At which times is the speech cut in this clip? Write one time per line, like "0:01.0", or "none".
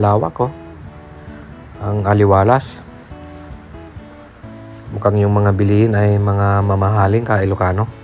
none